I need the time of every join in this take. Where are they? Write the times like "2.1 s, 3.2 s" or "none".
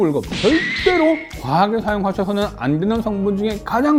none